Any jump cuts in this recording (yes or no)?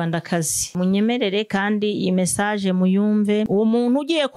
yes